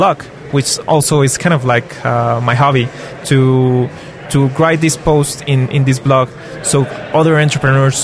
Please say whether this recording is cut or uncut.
uncut